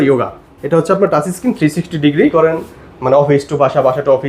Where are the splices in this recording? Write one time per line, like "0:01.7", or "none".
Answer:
0:02.3